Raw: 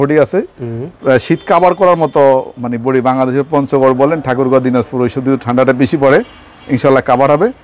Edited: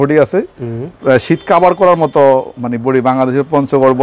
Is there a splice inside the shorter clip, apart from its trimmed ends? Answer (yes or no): no